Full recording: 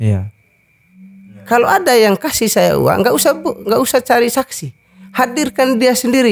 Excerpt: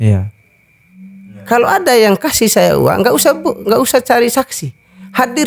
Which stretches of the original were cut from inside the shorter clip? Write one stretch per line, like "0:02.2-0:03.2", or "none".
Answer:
none